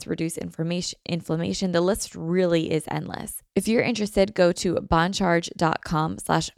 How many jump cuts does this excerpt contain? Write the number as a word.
one